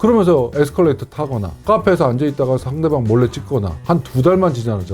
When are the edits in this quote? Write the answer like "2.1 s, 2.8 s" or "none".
1.6 s, 3.7 s